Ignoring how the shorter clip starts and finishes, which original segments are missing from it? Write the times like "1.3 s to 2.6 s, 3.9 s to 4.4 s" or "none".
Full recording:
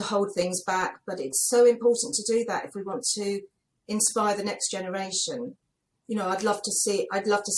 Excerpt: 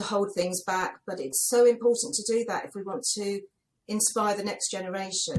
none